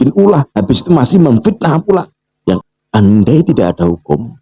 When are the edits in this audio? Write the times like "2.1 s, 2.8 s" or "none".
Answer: 2.6 s